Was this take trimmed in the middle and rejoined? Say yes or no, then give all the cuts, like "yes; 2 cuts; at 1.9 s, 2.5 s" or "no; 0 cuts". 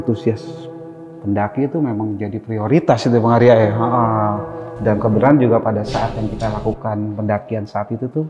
no; 0 cuts